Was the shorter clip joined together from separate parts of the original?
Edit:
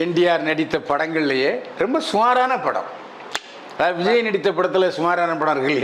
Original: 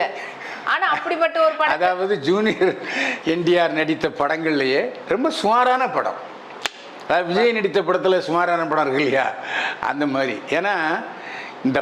no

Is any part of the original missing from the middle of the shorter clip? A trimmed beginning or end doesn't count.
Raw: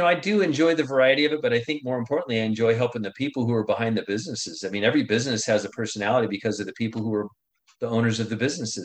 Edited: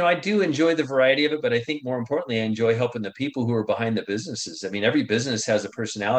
no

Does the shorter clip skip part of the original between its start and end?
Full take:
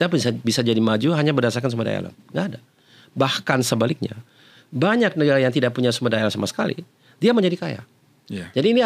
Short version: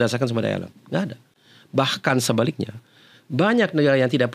no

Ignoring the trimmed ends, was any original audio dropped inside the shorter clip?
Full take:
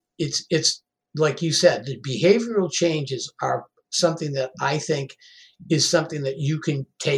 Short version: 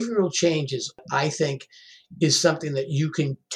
yes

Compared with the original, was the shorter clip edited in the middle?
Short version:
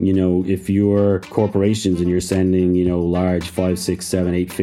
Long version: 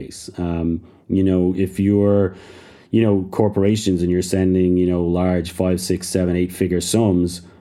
yes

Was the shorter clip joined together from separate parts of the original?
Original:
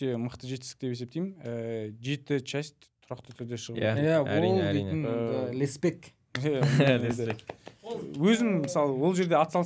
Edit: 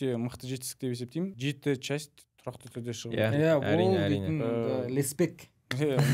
yes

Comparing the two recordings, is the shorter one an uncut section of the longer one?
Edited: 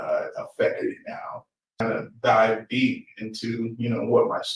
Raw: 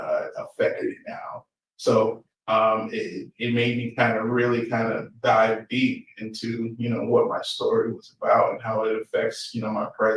no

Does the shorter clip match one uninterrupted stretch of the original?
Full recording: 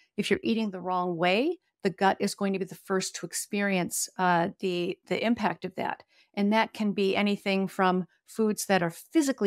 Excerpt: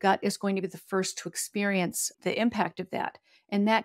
no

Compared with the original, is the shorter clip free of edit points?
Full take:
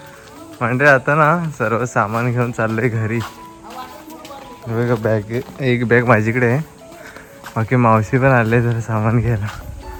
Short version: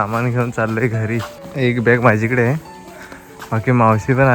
no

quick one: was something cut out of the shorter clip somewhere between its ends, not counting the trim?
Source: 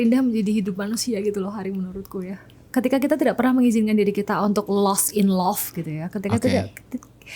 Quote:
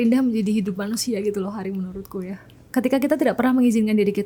no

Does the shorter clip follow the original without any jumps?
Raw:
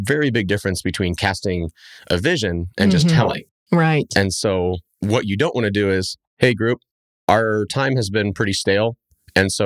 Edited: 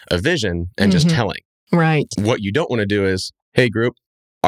no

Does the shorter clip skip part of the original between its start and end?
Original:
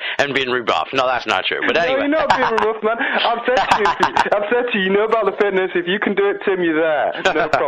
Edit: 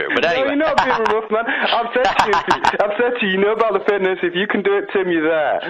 no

